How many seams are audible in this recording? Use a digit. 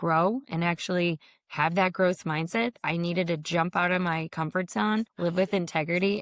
1